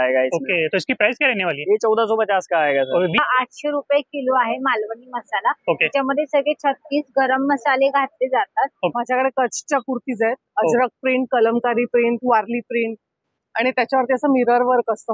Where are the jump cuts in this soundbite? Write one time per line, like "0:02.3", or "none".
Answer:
0:03.2
0:08.9